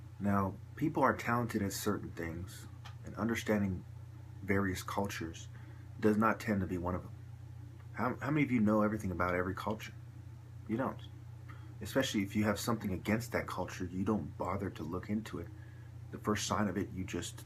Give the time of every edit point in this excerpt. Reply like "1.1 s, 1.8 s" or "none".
none